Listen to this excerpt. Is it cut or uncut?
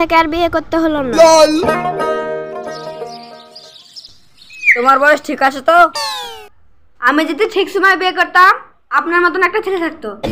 uncut